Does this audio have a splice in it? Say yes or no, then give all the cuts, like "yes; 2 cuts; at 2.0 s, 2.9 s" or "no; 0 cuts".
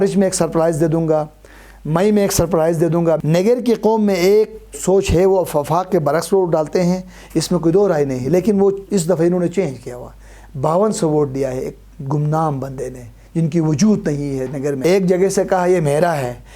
yes; 2 cuts; at 3.2 s, 14.8 s